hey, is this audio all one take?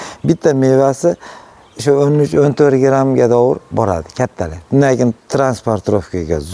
yes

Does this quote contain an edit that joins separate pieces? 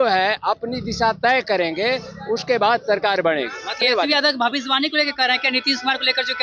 yes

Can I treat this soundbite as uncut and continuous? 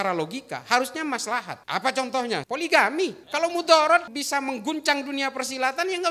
no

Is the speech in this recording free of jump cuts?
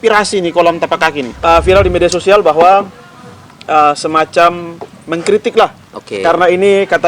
no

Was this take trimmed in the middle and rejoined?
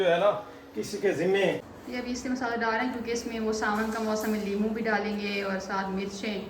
yes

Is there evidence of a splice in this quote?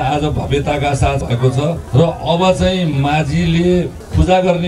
yes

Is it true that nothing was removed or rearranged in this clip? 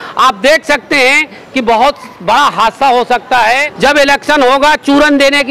no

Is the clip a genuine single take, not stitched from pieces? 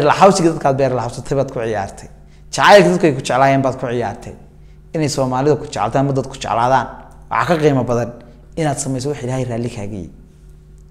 yes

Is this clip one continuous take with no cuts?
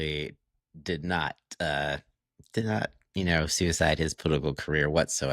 yes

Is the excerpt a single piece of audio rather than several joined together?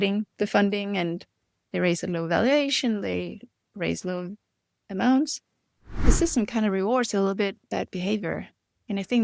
no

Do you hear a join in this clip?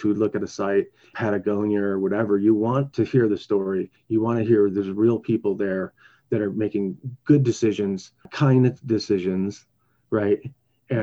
yes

